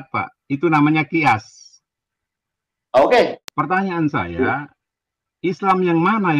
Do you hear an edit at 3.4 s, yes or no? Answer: yes